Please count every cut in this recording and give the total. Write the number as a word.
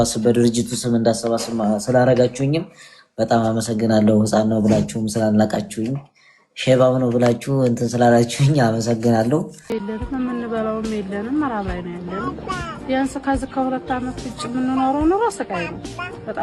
one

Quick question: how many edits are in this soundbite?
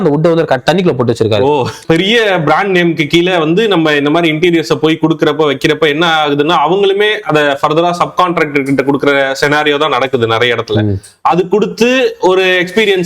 one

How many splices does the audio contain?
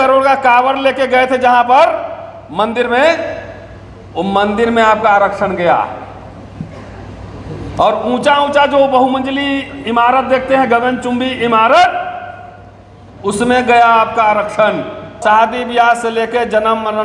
one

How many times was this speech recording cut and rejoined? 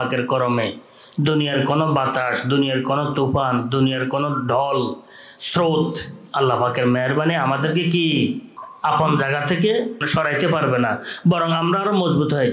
two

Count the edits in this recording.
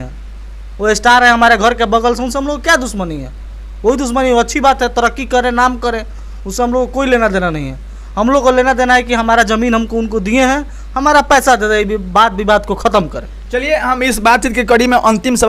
zero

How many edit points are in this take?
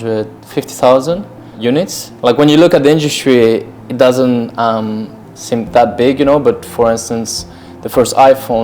one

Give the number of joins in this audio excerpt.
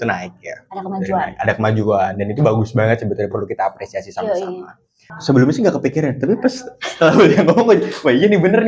one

